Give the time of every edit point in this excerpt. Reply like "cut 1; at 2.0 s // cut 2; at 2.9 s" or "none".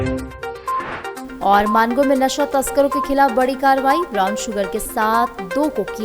cut 1; at 1.2 s